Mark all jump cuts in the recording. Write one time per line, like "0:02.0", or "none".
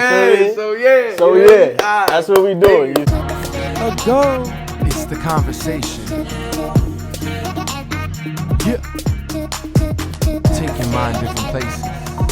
0:03.1